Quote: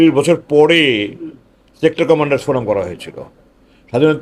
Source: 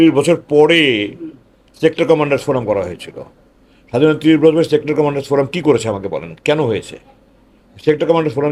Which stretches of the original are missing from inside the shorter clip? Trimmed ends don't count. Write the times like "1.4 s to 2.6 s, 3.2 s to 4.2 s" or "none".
none